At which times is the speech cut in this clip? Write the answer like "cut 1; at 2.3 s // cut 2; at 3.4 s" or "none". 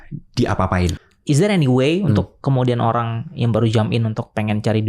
cut 1; at 1.0 s